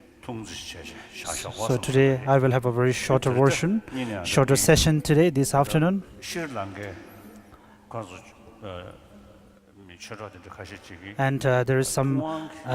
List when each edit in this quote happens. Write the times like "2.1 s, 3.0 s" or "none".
6.8 s

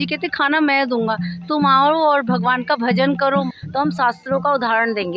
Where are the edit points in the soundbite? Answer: 3.5 s

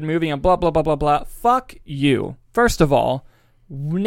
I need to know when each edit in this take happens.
none

